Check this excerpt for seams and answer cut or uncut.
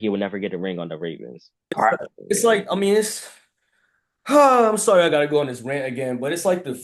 cut